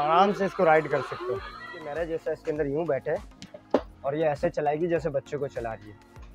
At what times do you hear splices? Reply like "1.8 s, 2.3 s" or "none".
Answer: 1.9 s